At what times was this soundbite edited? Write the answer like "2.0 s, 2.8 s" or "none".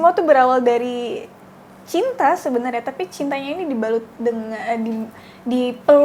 none